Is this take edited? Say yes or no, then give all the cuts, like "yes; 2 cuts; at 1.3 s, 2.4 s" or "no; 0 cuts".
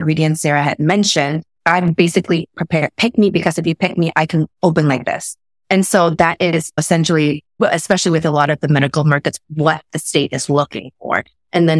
no; 0 cuts